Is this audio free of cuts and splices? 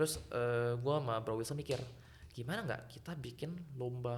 yes; 0 cuts

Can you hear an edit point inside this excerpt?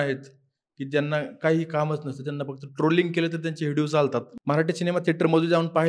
yes; 1 cut; at 4.3 s

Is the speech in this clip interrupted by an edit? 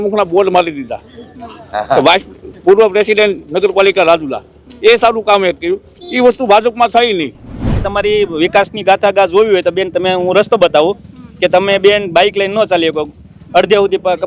yes; 1 cut; at 7.9 s

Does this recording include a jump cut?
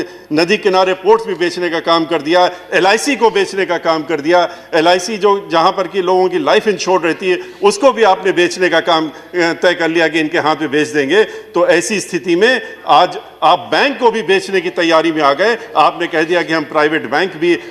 no; 0 cuts

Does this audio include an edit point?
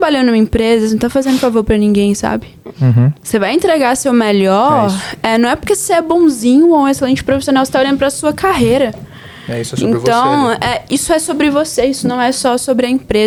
no; 0 cuts

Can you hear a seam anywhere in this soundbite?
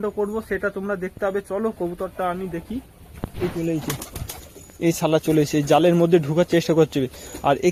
no; 0 cuts

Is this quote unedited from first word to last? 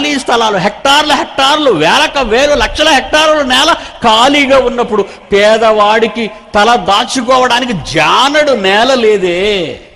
yes; 0 cuts

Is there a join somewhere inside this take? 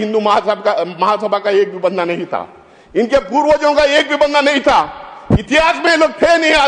no; 0 cuts

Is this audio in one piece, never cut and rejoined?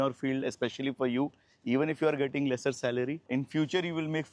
no; 1 cut; at 3.2 s

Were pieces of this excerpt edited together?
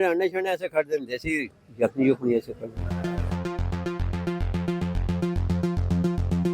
yes; 1 cut; at 2.9 s

